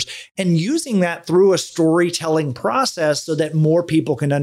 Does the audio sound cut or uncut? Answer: uncut